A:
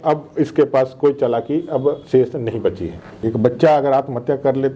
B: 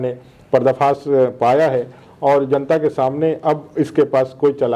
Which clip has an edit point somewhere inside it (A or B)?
A